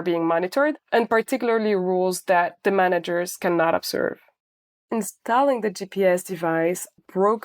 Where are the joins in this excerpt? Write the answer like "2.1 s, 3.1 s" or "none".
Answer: 4.8 s